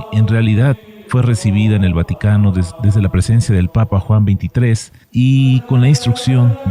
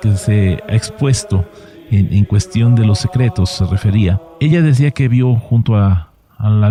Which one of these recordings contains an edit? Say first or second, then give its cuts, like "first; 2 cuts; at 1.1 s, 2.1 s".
first; 1 cut; at 4.1 s